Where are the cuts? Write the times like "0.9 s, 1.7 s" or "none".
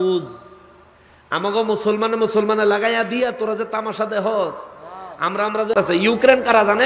5.7 s